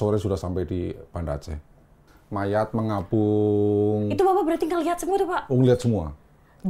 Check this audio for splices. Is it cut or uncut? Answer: cut